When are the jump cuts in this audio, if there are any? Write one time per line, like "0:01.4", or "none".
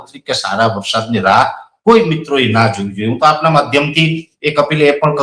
none